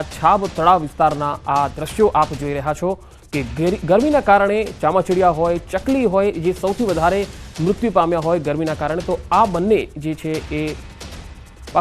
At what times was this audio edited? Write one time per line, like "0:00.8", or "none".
0:06.4